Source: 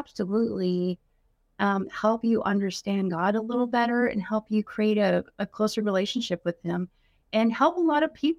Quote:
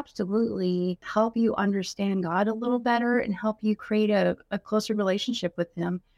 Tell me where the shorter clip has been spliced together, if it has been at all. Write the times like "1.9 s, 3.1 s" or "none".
1.0 s